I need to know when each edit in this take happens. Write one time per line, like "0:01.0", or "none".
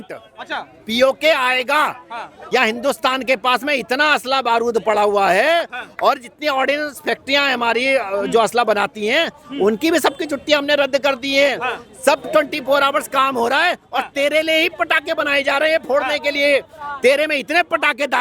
0:02.4